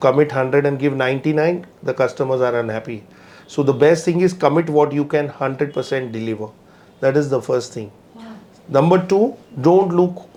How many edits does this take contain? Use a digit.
0